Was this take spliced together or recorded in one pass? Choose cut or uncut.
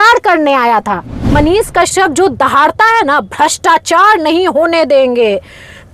cut